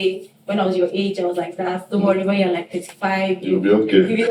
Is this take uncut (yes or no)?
yes